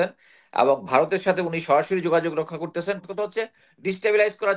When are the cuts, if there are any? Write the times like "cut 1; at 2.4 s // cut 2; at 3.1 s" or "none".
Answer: cut 1; at 3.0 s